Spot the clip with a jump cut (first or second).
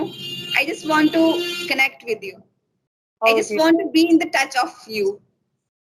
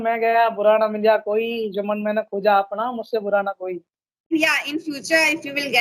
second